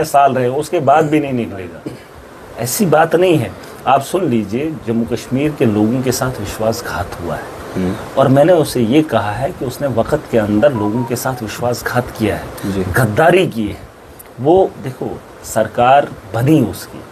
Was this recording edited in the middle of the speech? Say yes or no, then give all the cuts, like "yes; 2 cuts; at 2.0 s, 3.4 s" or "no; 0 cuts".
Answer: no; 0 cuts